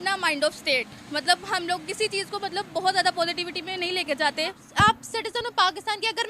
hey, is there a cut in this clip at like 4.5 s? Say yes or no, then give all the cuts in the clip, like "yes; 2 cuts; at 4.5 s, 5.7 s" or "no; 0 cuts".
yes; 1 cut; at 4.5 s